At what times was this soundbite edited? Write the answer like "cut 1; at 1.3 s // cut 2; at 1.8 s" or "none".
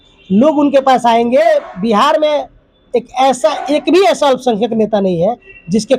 cut 1; at 1.5 s